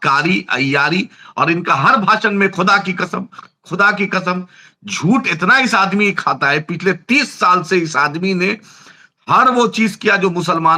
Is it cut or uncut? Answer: uncut